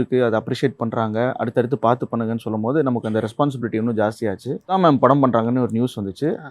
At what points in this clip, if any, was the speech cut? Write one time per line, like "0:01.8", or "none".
0:04.8